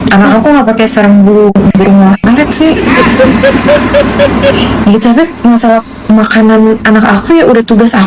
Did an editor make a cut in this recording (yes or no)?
no